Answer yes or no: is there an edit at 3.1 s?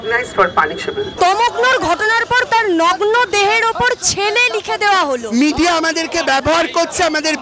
no